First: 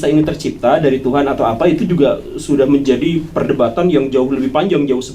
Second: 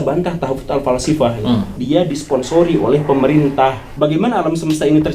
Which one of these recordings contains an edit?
second; 2 cuts; at 1.8 s, 3.9 s

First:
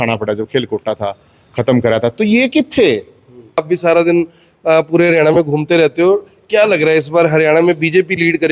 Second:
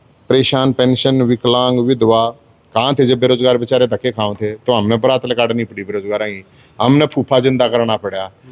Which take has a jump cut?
first; 1 cut; at 3.6 s

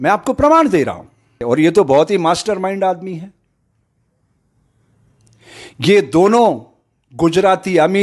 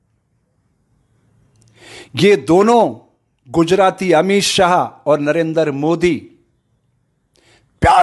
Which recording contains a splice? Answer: first; 1 cut; at 1.4 s

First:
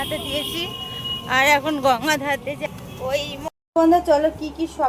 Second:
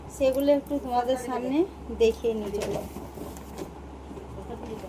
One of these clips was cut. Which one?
first; 1 cut; at 3.5 s

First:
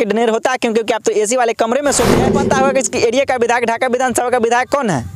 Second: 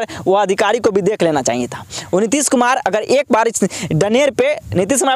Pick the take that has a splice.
first; 1 cut; at 2.4 s

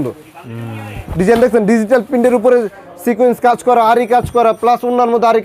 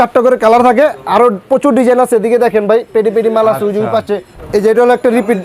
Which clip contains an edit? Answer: second; 1 cut; at 4.3 s

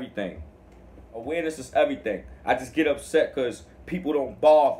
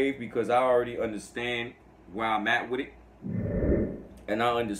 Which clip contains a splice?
first; 1 cut; at 1.2 s

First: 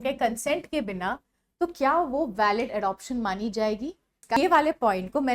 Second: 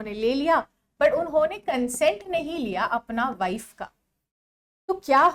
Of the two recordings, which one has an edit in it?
first; 1 cut; at 4.4 s

